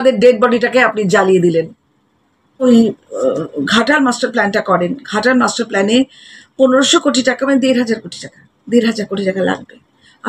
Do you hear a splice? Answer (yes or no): yes